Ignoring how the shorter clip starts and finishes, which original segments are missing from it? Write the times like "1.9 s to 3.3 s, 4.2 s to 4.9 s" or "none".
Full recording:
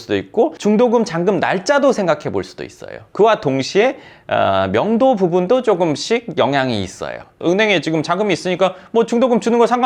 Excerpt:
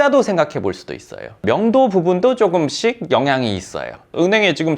3.1 s to 4.7 s